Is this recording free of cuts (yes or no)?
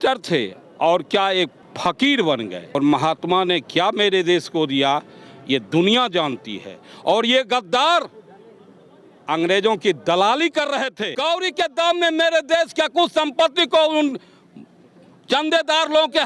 no